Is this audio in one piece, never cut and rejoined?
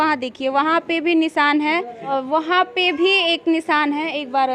no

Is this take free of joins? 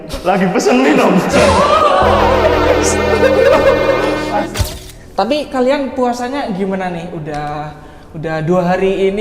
no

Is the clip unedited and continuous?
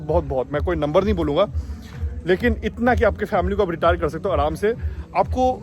yes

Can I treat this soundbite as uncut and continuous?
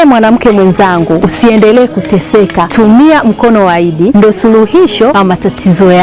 no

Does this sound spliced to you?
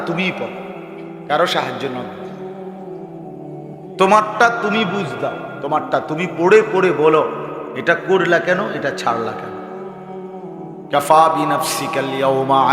yes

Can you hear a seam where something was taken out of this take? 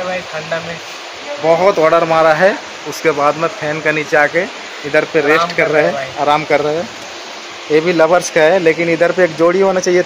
no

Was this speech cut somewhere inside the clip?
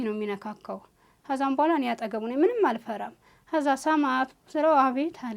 no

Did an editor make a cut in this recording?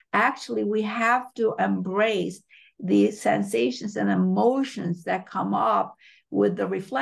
no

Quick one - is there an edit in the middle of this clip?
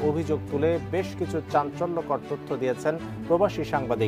no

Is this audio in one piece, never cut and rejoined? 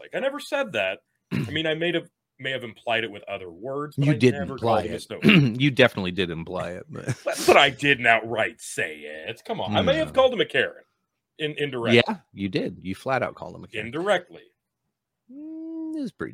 yes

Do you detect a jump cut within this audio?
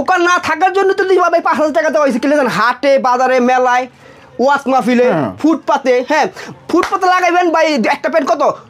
no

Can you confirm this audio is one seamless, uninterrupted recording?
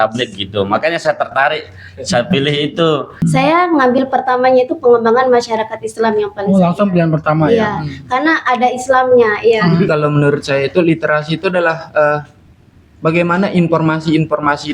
no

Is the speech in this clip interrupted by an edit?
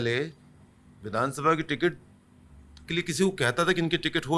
no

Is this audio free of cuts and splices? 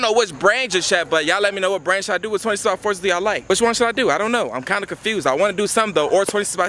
yes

